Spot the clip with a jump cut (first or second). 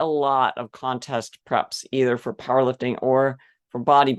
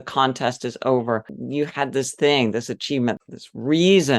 second